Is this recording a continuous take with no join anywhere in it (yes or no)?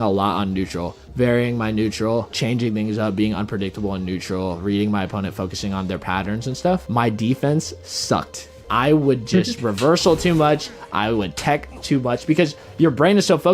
no